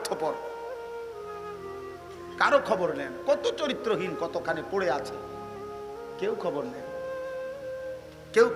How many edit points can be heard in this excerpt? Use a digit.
2